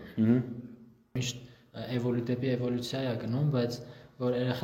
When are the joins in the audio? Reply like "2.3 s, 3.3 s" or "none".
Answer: 1.3 s